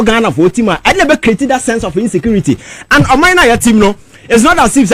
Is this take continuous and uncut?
yes; 0 cuts

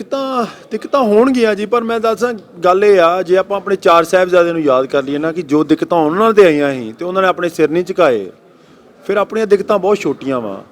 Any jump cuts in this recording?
no; 0 cuts

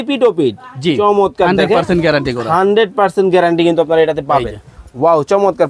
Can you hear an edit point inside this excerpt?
no; 0 cuts

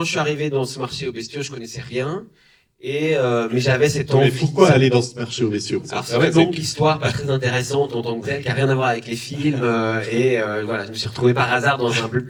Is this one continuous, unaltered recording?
yes; 0 cuts

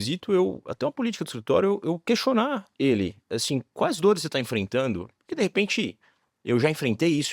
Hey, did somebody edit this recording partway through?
no; 0 cuts

